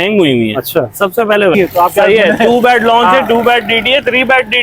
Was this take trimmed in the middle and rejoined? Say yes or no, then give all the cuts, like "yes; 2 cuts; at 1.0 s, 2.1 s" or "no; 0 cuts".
yes; 1 cut; at 1.5 s